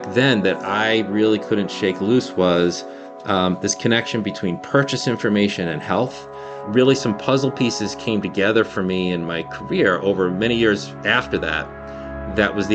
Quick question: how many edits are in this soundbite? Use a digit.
0